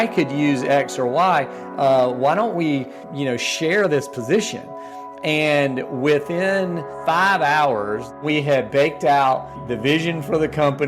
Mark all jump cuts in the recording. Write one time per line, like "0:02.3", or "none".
0:03.0
0:06.9
0:08.2
0:09.6